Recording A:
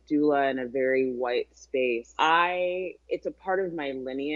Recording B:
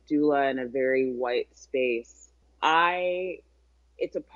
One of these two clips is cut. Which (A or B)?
A